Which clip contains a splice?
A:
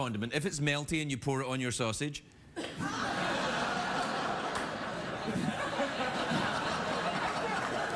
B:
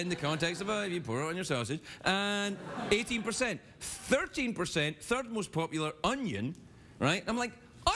B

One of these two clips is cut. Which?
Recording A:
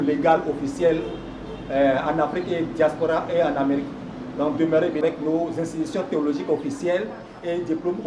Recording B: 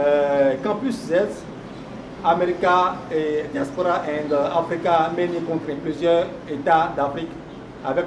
A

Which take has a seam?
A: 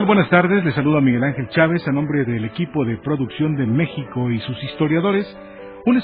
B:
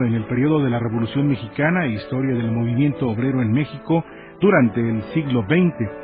B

